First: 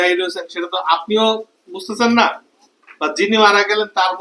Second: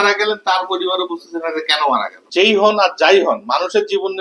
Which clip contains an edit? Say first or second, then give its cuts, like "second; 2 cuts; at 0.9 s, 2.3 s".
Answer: second; 1 cut; at 2.2 s